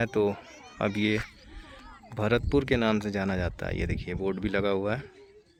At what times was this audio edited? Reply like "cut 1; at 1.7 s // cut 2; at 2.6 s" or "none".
none